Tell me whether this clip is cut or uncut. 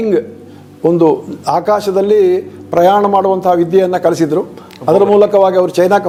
uncut